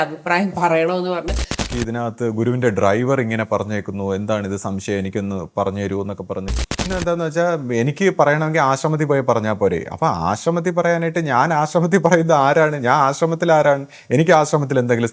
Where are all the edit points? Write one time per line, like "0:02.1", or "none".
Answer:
0:01.7
0:06.9